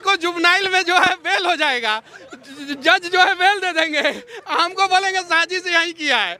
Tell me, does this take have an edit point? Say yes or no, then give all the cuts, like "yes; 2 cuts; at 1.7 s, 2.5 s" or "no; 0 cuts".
no; 0 cuts